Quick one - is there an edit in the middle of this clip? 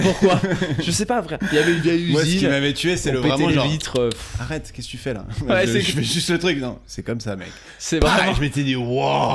no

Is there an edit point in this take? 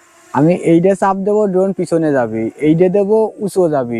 no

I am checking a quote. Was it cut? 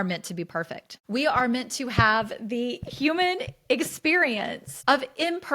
yes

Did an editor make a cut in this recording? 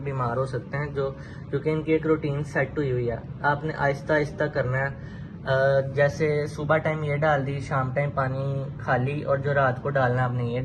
no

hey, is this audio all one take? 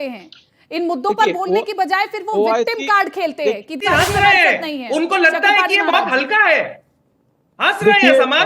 no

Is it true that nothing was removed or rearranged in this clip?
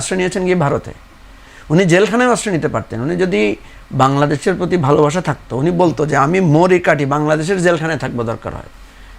yes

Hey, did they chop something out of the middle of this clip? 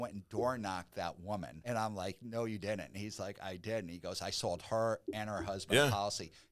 yes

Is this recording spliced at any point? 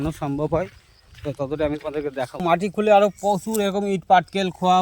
yes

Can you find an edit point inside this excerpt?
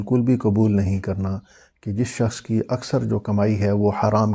no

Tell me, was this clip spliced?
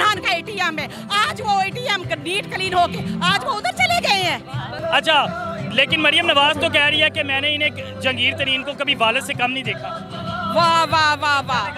no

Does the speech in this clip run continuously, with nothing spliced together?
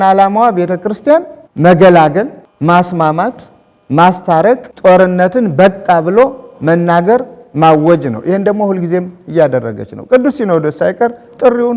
no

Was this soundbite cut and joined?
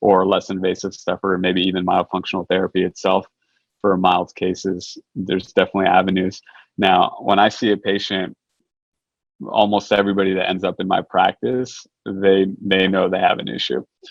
no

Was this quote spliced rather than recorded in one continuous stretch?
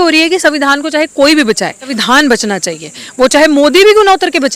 yes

